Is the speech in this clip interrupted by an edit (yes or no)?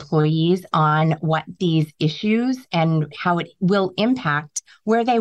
yes